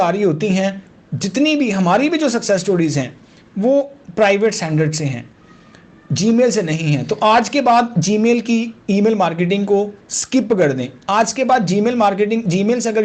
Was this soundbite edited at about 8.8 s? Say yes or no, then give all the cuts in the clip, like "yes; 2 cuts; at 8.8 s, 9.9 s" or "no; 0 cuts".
no; 0 cuts